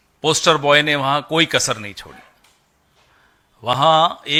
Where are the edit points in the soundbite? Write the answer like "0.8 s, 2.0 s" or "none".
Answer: none